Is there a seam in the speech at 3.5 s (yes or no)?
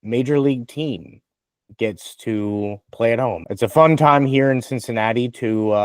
yes